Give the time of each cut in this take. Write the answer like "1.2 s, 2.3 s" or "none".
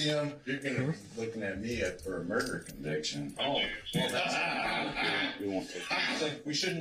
none